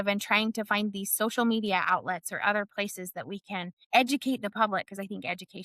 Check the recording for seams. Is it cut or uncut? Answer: cut